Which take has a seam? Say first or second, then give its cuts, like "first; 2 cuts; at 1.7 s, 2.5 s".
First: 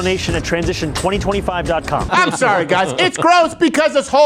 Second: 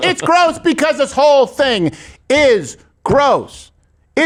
first; 1 cut; at 2.1 s